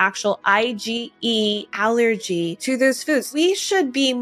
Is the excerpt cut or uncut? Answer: cut